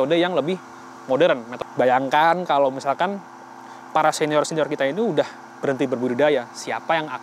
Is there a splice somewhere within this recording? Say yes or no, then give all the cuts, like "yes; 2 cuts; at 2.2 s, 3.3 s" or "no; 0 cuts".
yes; 1 cut; at 1.5 s